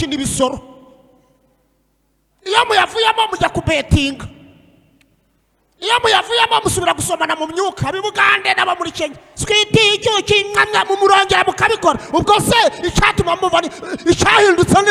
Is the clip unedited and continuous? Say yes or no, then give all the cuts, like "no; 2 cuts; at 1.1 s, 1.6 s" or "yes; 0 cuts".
yes; 0 cuts